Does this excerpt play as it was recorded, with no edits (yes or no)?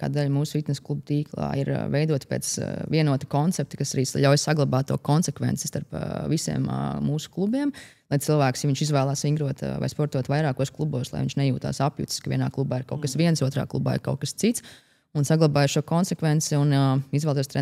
yes